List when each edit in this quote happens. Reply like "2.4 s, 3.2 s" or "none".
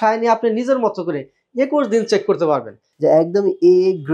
2.8 s